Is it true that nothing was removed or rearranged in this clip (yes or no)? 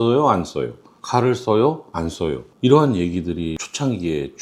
yes